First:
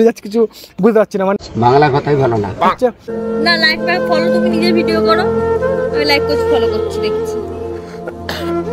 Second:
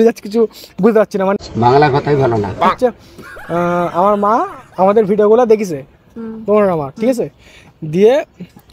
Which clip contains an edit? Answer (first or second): first